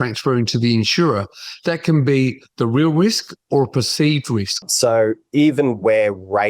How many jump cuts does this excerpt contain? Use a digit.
1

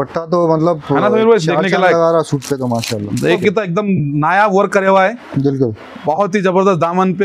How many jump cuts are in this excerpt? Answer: 1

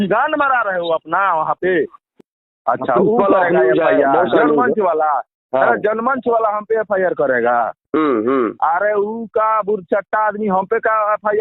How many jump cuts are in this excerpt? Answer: 1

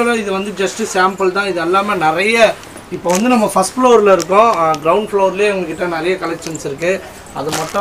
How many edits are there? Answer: 0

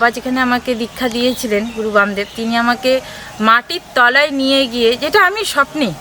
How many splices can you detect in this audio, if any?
0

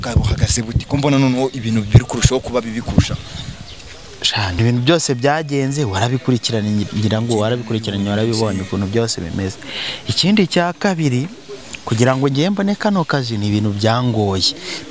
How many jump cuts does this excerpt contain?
1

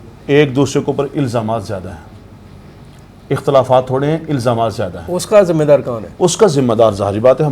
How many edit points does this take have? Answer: 0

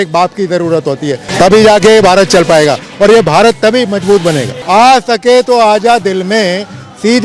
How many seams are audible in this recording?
2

